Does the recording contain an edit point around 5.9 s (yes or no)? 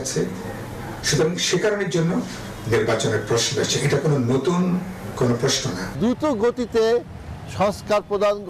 yes